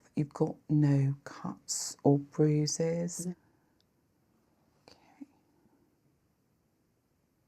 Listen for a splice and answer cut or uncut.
cut